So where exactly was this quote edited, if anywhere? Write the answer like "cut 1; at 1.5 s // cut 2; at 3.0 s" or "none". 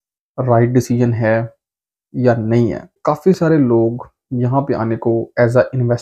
cut 1; at 3.0 s